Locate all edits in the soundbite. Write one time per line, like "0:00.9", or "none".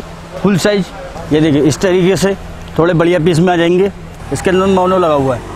0:01.0
0:04.1